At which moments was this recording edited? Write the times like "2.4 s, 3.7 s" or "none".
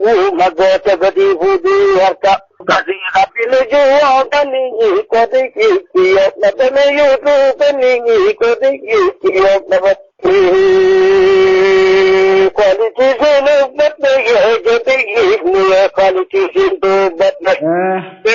2.2 s

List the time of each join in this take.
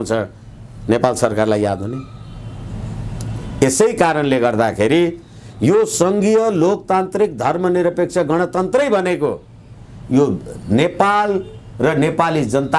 none

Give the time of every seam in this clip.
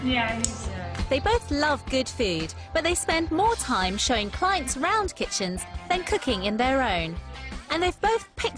4.7 s

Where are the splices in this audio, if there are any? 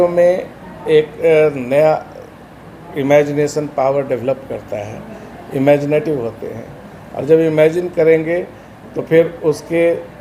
none

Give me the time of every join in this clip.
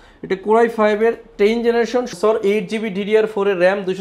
2.1 s

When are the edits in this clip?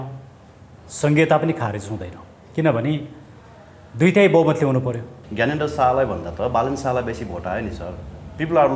5.2 s

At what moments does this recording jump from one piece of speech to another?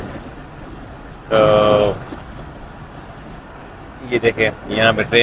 none

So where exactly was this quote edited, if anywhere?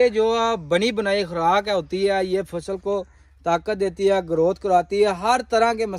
none

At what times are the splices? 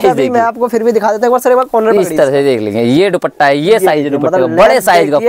none

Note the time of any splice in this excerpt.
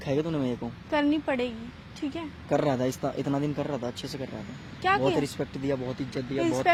none

